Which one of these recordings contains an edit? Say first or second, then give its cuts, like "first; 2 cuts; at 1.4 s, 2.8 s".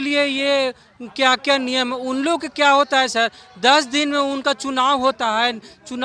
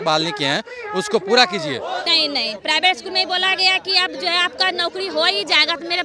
second; 1 cut; at 2.1 s